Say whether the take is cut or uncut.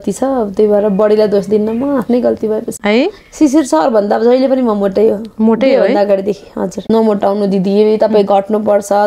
cut